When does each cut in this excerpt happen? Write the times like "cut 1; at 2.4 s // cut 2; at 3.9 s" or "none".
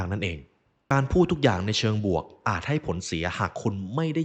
cut 1; at 0.9 s